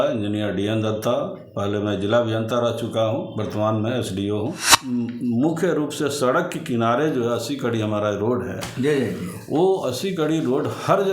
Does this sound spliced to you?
yes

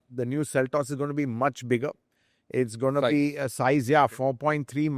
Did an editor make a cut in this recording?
no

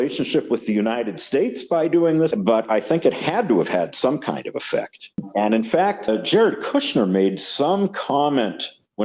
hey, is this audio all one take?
no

